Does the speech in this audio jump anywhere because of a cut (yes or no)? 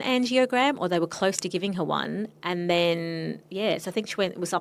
no